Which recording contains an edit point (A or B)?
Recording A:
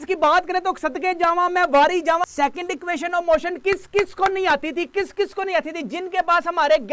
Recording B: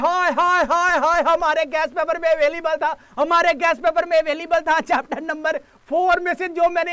A